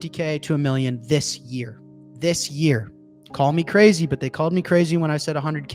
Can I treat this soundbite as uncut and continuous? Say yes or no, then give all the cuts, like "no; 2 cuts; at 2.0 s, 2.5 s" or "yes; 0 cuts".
yes; 0 cuts